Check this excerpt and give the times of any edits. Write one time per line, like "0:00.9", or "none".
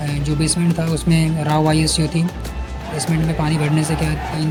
none